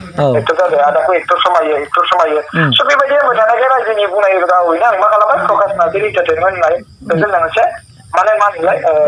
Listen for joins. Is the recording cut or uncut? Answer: uncut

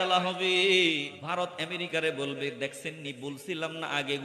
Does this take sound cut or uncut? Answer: cut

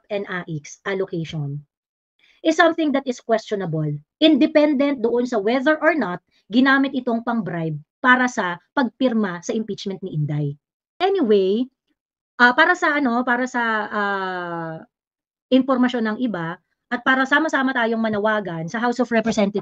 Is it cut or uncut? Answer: cut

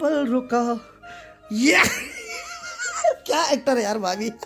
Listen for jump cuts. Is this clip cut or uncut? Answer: uncut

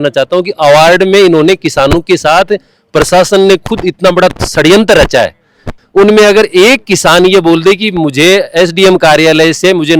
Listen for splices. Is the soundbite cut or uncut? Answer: cut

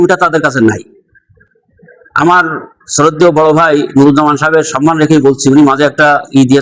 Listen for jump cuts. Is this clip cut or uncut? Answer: uncut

